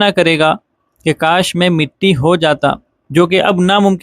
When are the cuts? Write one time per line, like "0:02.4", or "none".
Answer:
none